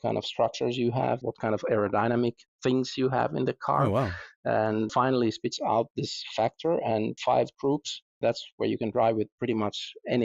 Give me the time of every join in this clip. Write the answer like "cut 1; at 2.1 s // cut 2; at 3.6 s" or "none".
cut 1; at 1.2 s // cut 2; at 4.9 s // cut 3; at 7.2 s